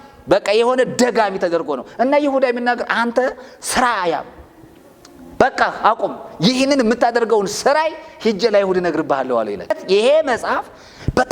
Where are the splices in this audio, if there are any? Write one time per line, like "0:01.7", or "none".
0:09.8

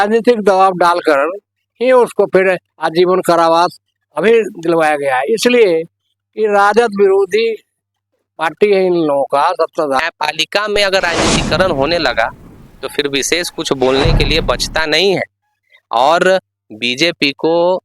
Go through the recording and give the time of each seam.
0:10.0

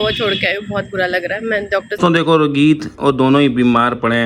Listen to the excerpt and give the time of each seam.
0:01.9

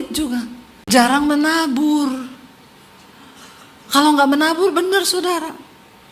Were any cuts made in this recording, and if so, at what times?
0:00.9

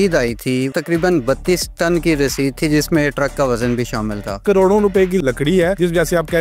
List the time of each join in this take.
0:00.8
0:04.4

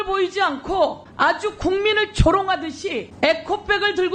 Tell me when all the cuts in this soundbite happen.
0:01.1
0:03.1

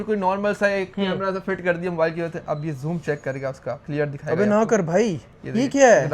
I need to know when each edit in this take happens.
0:03.8

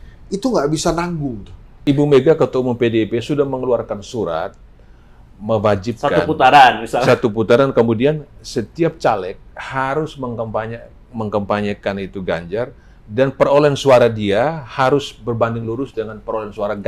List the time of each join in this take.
0:01.8

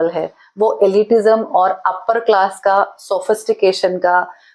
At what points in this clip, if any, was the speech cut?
none

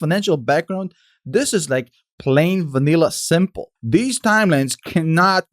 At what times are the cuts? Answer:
0:03.7

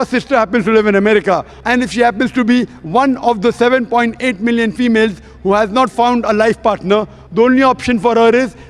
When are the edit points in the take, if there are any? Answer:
0:01.5

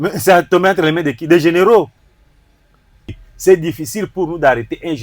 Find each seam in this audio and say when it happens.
0:03.2

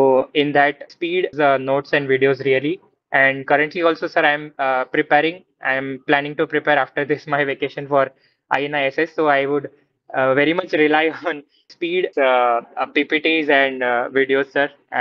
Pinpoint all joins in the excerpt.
0:01.3
0:12.0

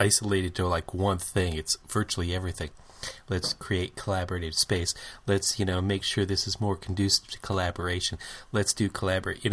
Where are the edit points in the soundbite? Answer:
none

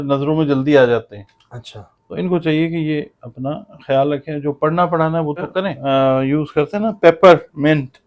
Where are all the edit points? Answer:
0:05.8

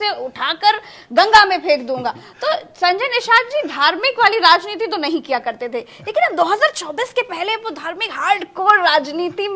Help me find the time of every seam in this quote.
none

